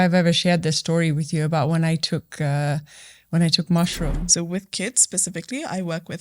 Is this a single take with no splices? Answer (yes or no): no